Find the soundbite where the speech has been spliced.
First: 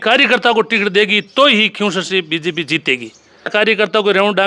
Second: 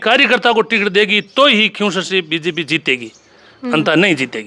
first; 1 cut; at 3.5 s

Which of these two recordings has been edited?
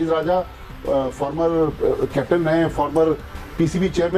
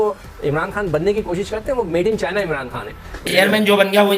second; 1 cut; at 3.3 s

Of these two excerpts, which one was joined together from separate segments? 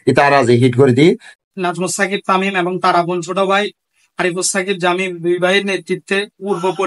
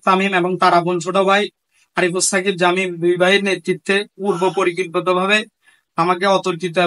first; 1 cut; at 1.3 s

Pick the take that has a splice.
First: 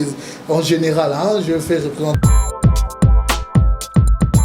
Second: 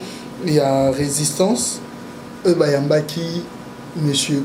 first; 1 cut; at 2.1 s

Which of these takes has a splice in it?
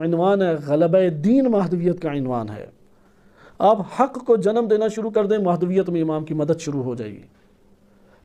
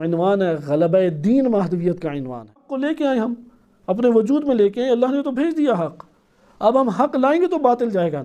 second; 1 cut; at 2.7 s

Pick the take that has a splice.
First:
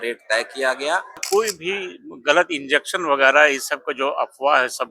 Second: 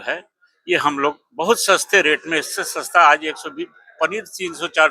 first; 1 cut; at 1.2 s

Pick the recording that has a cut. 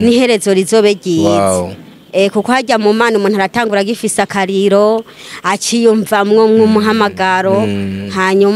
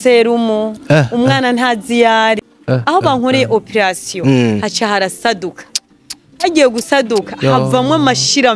second; 1 cut; at 2.4 s

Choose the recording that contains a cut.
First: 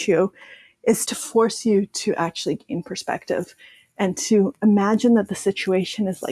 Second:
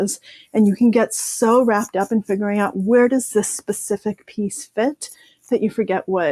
first; 1 cut; at 1.0 s

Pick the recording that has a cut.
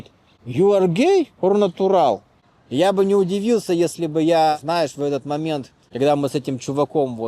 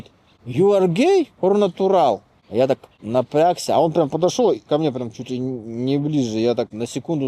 first; 1 cut; at 2.4 s

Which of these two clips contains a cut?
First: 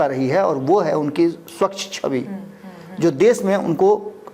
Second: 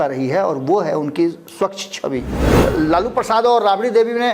second; 1 cut; at 2.4 s

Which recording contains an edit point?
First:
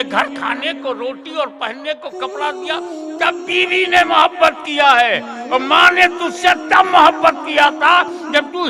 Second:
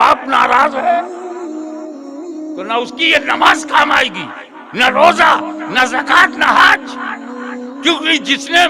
second; 2 cuts; at 1.1 s, 2.6 s

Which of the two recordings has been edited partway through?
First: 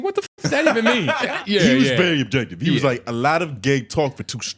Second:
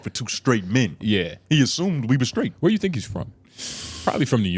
first; 1 cut; at 1.3 s

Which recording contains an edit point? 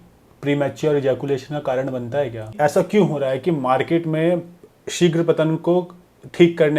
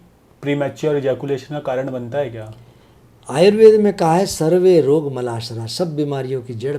first; 1 cut; at 2.5 s

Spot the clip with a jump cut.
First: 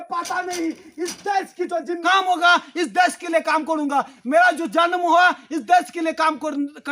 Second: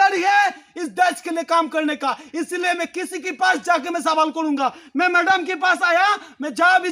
first; 1 cut; at 2.0 s

